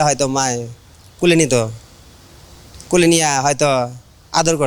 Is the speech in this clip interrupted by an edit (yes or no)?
no